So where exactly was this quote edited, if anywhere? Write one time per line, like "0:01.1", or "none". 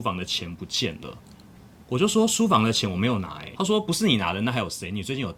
none